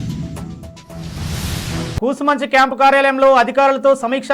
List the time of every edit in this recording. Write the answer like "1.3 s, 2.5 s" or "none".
1.9 s